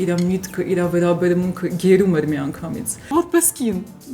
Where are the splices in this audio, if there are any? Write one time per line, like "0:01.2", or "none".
0:03.1